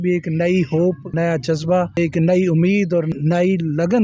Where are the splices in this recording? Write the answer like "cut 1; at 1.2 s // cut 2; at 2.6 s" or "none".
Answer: cut 1; at 1.1 s // cut 2; at 2.0 s // cut 3; at 3.1 s